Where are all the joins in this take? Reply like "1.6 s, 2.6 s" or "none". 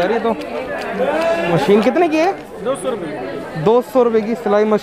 1.5 s